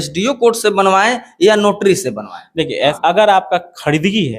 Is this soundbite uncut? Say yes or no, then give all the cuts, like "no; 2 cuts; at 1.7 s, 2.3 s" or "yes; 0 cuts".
no; 1 cut; at 3.0 s